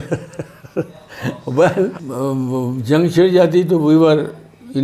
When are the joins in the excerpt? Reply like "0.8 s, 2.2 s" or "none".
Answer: 2.0 s

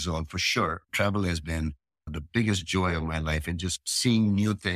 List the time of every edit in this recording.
0.9 s, 2.1 s, 3.9 s

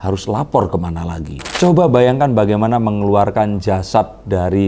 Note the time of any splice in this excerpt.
1.4 s

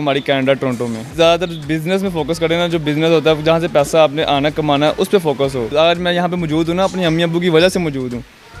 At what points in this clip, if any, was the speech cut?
1.0 s, 5.7 s

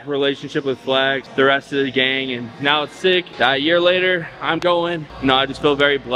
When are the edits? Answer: 1.2 s, 3.3 s, 5.1 s

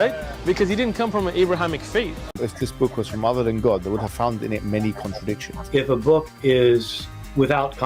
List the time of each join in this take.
2.3 s

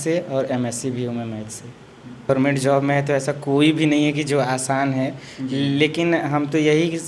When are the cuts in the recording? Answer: 2.3 s

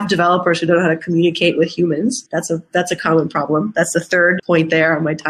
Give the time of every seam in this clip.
2.2 s, 4.4 s

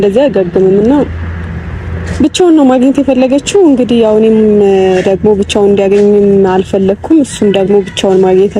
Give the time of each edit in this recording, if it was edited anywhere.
none

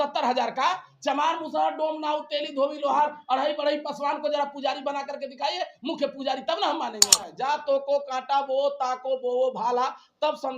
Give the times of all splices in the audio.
7.3 s

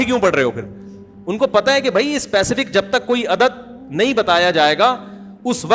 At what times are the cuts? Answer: none

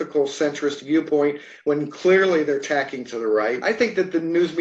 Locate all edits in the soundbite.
3.6 s

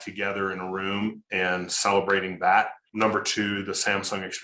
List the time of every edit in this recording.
2.9 s

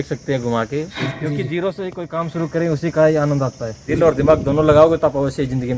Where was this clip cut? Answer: 1.0 s, 3.9 s

